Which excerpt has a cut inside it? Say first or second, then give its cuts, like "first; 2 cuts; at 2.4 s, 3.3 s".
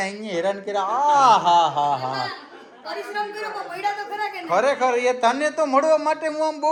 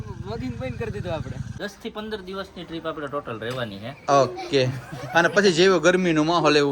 second; 1 cut; at 1.5 s